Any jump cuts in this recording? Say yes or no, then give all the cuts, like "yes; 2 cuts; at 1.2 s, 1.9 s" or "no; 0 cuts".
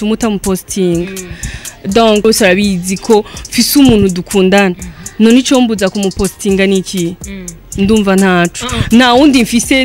yes; 1 cut; at 2.2 s